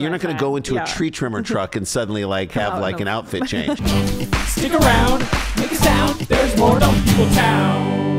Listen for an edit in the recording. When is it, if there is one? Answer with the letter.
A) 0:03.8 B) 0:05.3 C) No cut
A